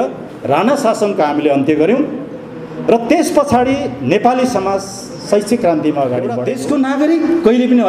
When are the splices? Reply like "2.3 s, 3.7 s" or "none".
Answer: 6.5 s